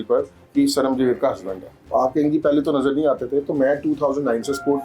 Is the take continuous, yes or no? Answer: no